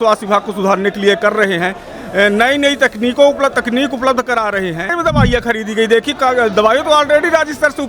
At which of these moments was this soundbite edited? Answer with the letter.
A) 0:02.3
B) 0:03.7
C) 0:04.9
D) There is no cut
C